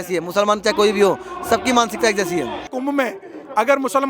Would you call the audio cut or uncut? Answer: cut